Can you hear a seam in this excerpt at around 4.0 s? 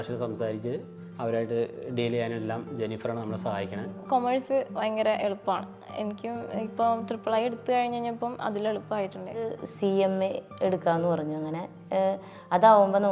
yes; 2 cuts; at 4.0 s, 9.6 s

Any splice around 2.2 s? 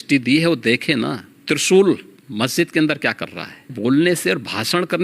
yes; 3 cuts; at 1.3 s, 2.2 s, 3.7 s

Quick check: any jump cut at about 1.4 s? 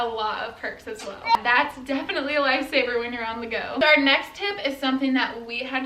yes; 1 cut; at 1.4 s

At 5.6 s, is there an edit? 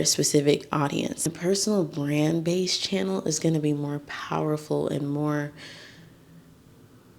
no; 1 cut; at 1.3 s

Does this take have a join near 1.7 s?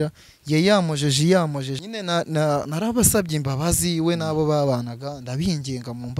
yes; 1 cut; at 1.7 s

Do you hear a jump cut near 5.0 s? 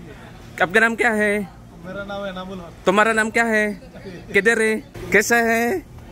yes; 1 cut; at 5.0 s

